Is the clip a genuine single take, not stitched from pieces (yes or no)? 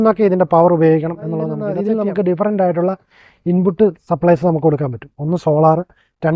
no